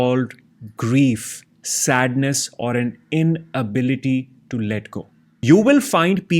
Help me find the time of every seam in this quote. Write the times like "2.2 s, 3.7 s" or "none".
5.3 s